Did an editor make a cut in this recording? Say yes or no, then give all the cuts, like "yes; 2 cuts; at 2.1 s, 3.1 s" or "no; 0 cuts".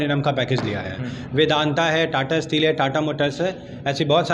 no; 0 cuts